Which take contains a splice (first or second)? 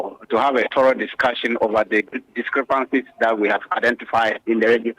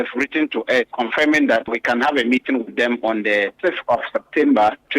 second